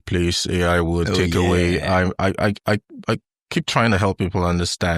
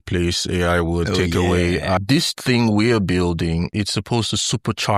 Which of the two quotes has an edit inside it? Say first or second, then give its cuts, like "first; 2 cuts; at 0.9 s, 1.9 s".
second; 2 cuts; at 2.0 s, 3.7 s